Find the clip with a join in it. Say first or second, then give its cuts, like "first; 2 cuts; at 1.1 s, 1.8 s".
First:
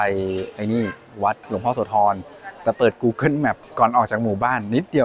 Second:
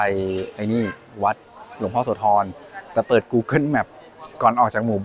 first; 2 cuts; at 1.4 s, 3.6 s